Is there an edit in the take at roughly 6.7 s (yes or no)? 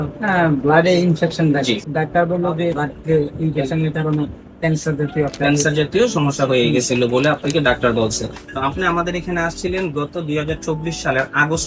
no